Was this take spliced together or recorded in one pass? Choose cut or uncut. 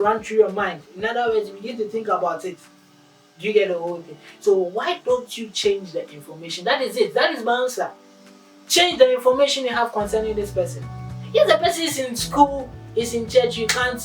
uncut